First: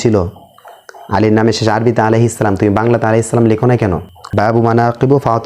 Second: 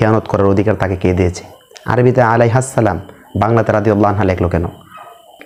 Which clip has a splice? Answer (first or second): first